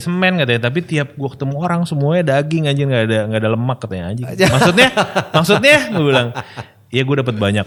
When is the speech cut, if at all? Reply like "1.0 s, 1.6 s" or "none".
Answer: none

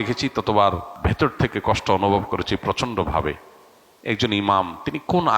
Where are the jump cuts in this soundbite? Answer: 1.0 s

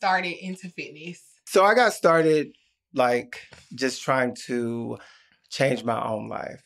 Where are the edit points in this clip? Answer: 1.3 s

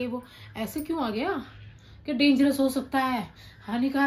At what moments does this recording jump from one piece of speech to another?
none

